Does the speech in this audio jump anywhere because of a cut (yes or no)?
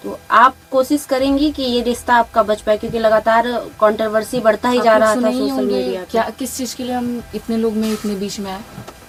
no